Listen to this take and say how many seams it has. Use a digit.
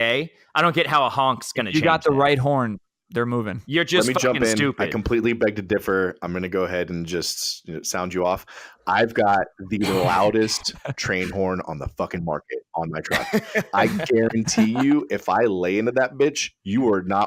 0